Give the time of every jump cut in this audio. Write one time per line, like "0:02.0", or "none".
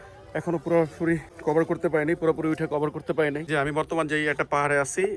0:01.3
0:03.5